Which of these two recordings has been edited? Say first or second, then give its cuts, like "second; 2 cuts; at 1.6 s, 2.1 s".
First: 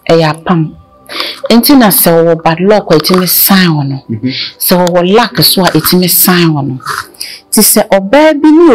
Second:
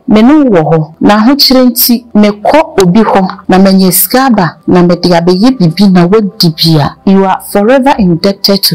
second; 5 cuts; at 0.9 s, 2.1 s, 3.4 s, 4.6 s, 6.9 s